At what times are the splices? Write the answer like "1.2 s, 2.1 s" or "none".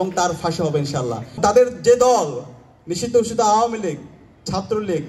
1.4 s